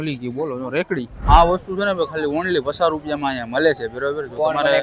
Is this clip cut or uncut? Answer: cut